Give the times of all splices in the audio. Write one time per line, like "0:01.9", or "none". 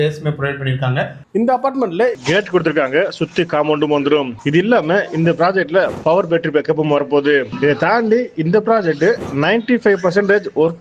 0:01.2
0:02.2